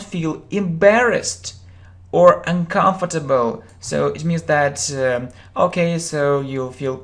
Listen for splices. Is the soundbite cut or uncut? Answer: uncut